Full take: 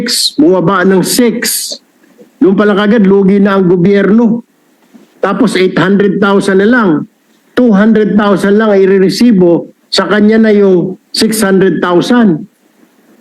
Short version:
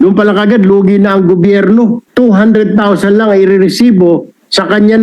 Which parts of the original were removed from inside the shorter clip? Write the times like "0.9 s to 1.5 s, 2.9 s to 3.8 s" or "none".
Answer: 4.4 s to 7.4 s